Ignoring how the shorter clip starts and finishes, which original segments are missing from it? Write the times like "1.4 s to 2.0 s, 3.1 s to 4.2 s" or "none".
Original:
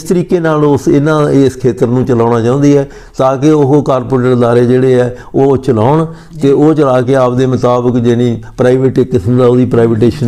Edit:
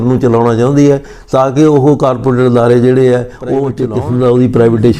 5.6 s to 9.0 s